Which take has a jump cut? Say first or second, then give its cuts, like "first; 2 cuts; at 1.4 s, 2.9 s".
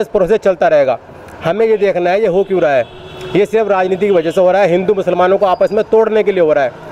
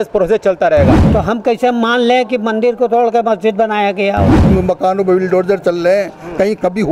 second; 2 cuts; at 1.0 s, 4.4 s